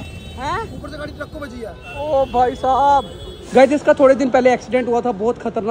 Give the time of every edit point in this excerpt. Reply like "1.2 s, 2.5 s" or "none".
1.8 s, 3.5 s